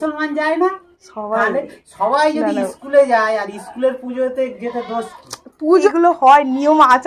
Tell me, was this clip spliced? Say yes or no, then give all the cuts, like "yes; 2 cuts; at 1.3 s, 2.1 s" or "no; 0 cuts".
yes; 1 cut; at 5.9 s